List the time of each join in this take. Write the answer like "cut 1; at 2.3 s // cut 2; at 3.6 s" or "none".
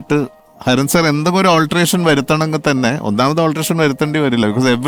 none